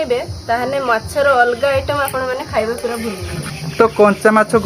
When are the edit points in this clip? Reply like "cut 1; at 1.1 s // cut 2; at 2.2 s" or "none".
cut 1; at 3.5 s